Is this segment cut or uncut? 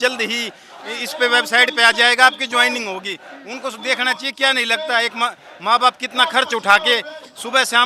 uncut